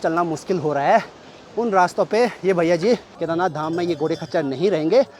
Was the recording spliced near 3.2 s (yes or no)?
yes